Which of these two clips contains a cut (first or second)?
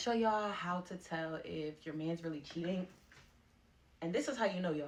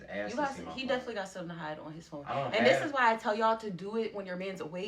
second